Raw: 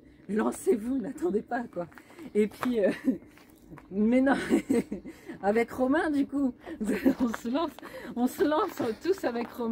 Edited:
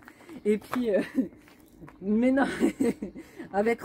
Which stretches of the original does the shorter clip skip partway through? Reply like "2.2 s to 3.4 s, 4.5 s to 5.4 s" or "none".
none

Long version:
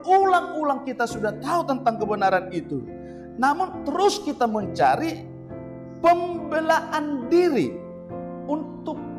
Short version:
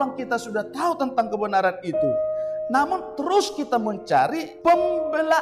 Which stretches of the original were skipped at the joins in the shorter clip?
5.2 s to 5.9 s

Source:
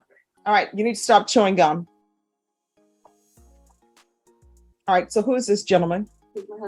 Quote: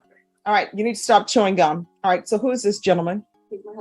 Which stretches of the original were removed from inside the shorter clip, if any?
1.9 s to 4.7 s

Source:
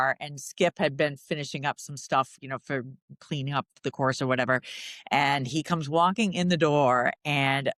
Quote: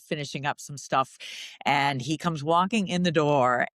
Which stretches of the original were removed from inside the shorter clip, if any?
2.5 s to 4.8 s

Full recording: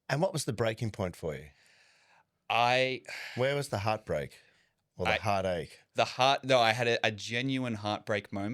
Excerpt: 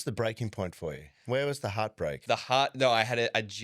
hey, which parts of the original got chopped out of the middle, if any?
1.5 s to 3.2 s, 4.3 s to 5.9 s

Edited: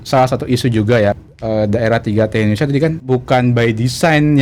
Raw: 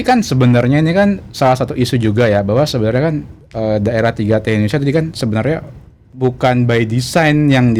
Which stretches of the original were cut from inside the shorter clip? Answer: 2.4 s to 3.3 s, 5.1 s to 6.1 s

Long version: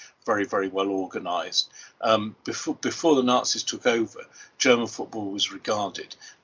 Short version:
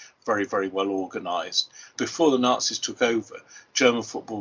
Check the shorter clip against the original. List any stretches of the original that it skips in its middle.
1.9 s to 2.8 s

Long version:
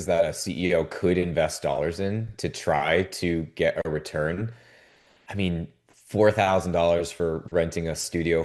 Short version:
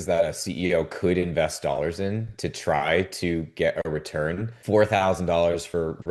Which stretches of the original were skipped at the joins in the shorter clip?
4.5 s to 6.0 s

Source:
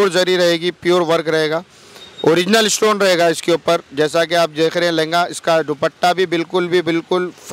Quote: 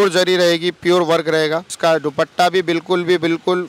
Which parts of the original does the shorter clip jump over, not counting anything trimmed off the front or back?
1.7 s to 5.4 s

